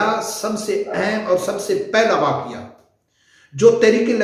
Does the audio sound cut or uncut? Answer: uncut